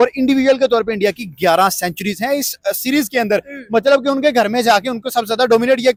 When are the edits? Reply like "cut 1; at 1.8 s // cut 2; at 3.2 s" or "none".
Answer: none

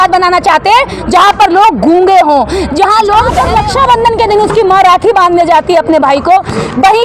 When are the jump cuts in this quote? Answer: cut 1; at 3.5 s

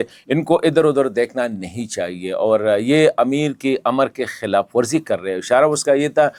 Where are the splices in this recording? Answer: none

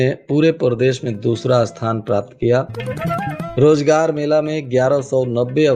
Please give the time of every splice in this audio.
none

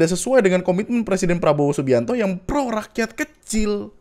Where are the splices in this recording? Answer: none

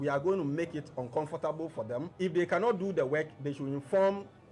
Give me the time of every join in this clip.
cut 1; at 2.1 s

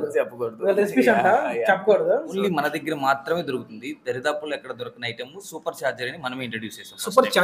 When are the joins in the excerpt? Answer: cut 1; at 2.3 s

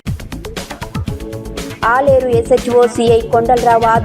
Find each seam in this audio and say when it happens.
cut 1; at 1.1 s

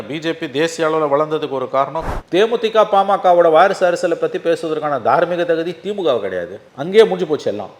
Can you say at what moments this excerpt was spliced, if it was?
cut 1; at 2.0 s

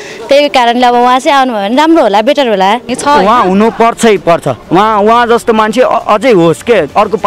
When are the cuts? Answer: cut 1; at 2.9 s

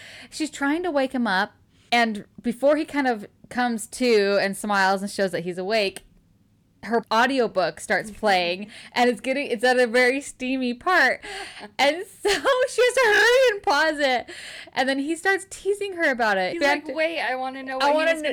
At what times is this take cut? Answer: cut 1; at 16.5 s

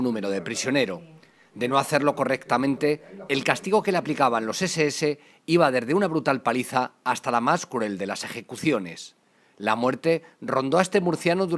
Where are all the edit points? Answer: cut 1; at 2.4 s

